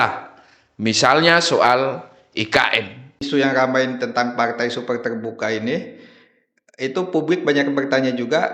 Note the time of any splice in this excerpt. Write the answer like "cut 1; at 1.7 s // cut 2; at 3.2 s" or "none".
cut 1; at 3.2 s